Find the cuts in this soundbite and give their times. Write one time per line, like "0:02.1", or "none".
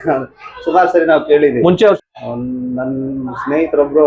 0:02.0